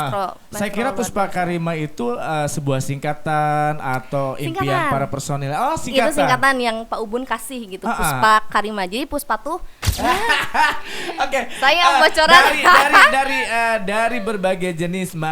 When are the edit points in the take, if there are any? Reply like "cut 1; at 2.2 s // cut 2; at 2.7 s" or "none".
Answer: cut 1; at 9.8 s

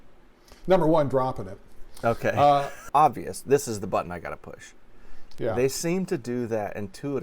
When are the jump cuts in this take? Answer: cut 1; at 2.8 s

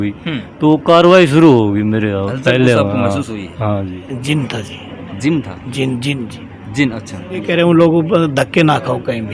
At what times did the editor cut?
cut 1; at 4.1 s // cut 2; at 7.5 s

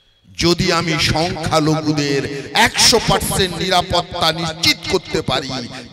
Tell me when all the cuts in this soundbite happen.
none

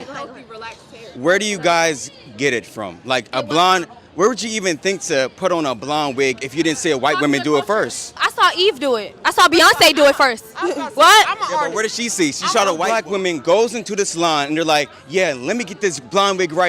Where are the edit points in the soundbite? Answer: cut 1; at 12.8 s

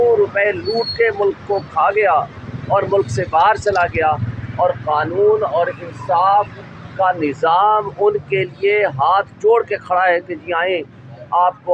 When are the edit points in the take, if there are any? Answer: none

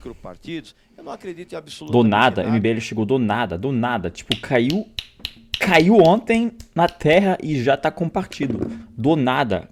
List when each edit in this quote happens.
none

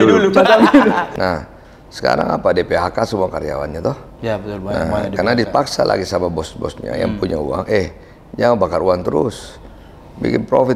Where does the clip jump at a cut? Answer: cut 1; at 1.1 s

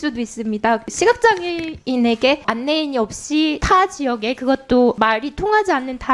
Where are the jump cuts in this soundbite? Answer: cut 1; at 0.9 s // cut 2; at 2.5 s // cut 3; at 3.6 s // cut 4; at 5.0 s

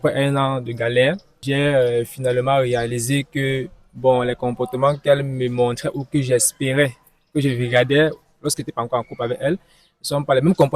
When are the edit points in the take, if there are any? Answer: cut 1; at 1.3 s

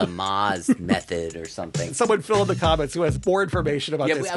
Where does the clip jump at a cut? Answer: cut 1; at 1.9 s // cut 2; at 3.2 s

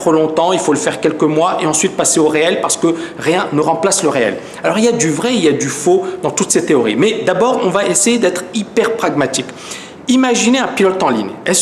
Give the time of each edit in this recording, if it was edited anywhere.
cut 1; at 5.4 s

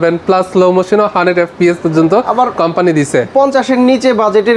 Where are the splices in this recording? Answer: none

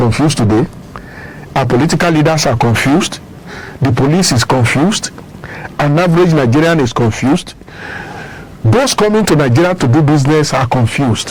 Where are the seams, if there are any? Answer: none

